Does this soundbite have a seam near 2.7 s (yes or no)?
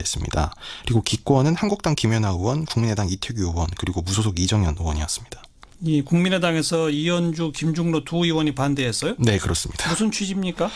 yes